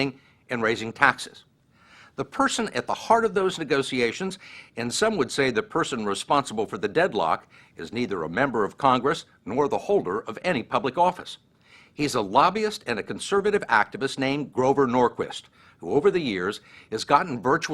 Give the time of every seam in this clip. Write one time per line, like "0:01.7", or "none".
0:05.4